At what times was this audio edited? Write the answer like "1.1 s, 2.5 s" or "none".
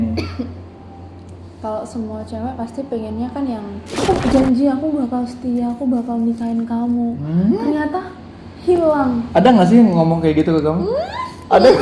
4.0 s